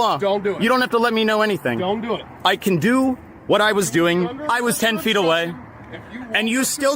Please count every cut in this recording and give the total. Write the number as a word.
one